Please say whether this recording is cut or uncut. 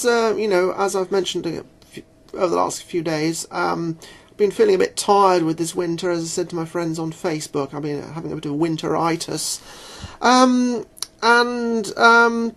uncut